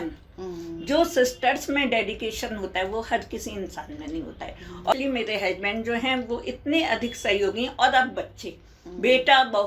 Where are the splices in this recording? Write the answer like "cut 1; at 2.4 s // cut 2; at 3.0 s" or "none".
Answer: cut 1; at 4.9 s

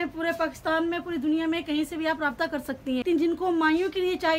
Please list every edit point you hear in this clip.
cut 1; at 3.0 s

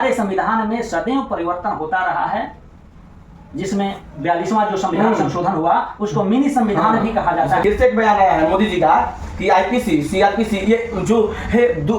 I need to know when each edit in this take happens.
cut 1; at 7.5 s

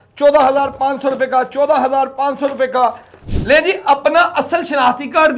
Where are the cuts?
cut 1; at 3.2 s

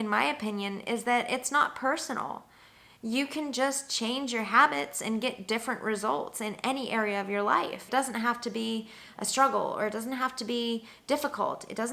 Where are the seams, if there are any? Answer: cut 1; at 7.9 s

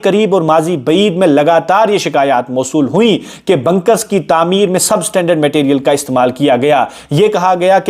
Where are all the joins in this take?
none

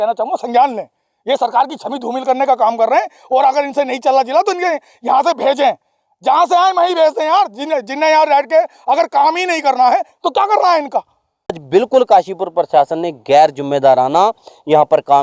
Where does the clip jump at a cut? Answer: cut 1; at 11.6 s

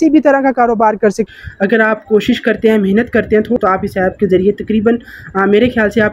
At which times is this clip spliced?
cut 1; at 1.3 s // cut 2; at 3.6 s

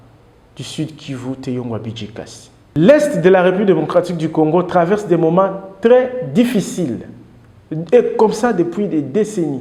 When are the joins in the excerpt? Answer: cut 1; at 2.8 s

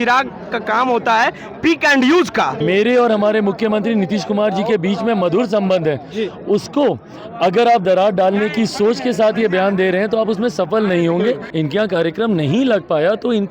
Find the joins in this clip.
cut 1; at 2.5 s // cut 2; at 11.5 s

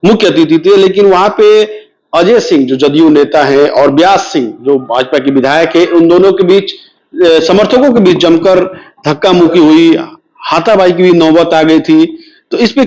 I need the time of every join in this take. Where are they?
none

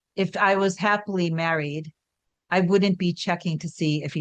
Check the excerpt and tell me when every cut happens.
none

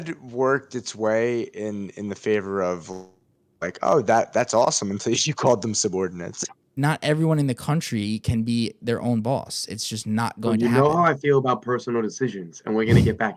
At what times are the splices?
cut 1; at 6.7 s

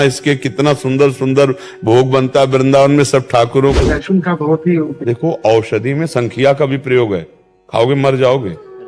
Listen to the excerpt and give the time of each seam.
cut 1; at 3.8 s

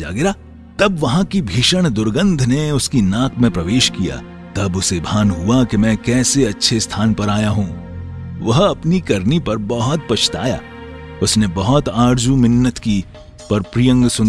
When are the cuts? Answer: none

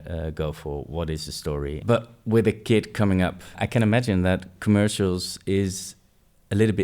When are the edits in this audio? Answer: cut 1; at 1.8 s // cut 2; at 3.6 s

